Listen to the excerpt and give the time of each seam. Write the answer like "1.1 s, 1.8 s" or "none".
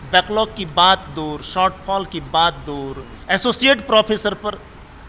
3.1 s